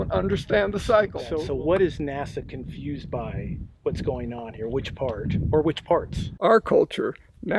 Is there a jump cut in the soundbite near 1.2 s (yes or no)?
yes